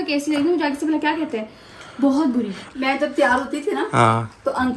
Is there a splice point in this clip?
yes; 1 cut; at 2.6 s

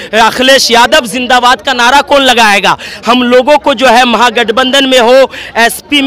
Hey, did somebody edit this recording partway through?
no; 0 cuts

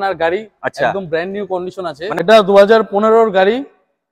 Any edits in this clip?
yes; 1 cut; at 2.2 s

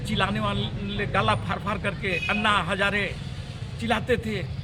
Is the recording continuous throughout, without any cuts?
yes; 0 cuts

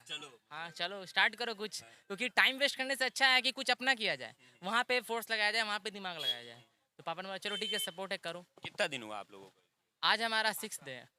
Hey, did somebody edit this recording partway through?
no; 0 cuts

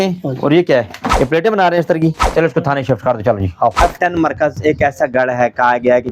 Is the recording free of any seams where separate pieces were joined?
no; 3 cuts; at 1.0 s, 2.2 s, 3.8 s

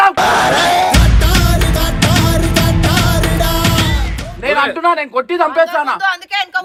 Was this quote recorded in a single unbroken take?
yes; 0 cuts

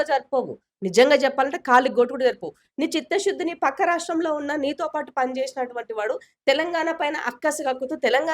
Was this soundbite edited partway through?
yes; 1 cut; at 2.6 s

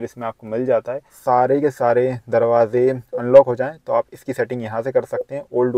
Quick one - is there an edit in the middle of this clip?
yes; 1 cut; at 1.2 s

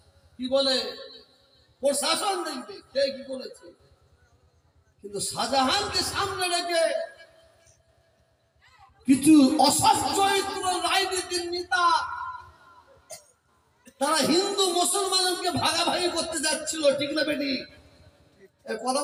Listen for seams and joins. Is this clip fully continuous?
yes; 0 cuts

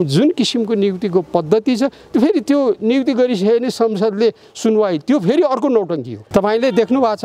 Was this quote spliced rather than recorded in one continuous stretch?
yes; 1 cut; at 6.2 s

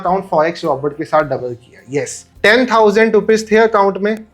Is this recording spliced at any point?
no; 0 cuts

